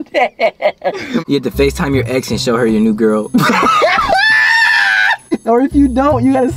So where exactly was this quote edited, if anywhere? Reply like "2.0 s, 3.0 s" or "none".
1.2 s, 5.2 s